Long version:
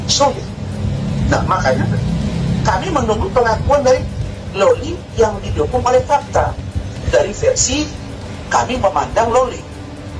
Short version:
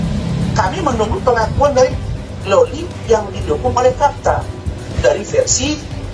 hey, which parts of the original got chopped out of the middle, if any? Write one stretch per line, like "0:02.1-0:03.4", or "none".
none